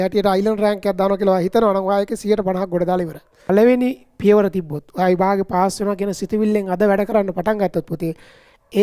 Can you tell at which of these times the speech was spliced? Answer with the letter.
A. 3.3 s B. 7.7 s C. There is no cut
A